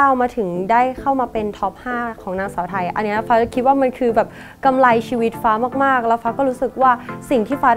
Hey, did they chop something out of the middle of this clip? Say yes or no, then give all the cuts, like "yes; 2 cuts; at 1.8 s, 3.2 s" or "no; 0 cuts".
no; 0 cuts